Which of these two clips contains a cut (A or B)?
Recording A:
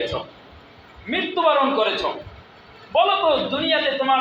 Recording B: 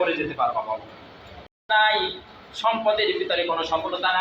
B